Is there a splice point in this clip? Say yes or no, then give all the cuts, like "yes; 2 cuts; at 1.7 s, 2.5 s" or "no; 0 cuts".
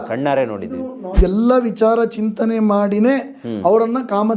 yes; 1 cut; at 1.1 s